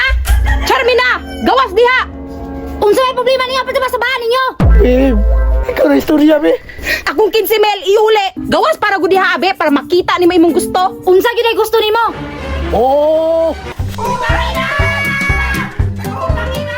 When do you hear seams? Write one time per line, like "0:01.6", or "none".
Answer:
0:08.4
0:13.7